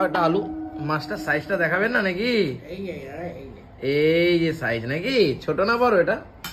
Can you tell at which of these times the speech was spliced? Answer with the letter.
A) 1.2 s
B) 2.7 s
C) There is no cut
C